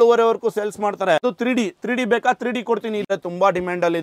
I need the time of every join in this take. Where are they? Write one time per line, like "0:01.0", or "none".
0:01.2
0:03.0